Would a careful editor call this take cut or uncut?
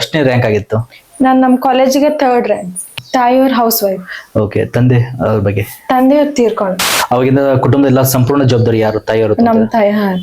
cut